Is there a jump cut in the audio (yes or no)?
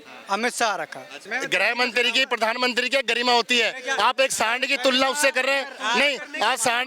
yes